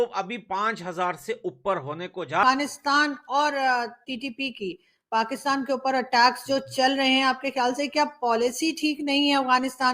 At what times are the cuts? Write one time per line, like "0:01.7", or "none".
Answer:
0:02.4